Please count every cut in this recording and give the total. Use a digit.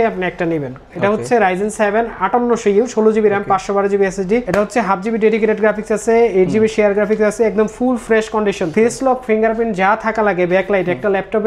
0